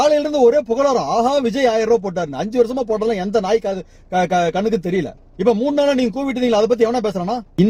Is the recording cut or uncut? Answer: uncut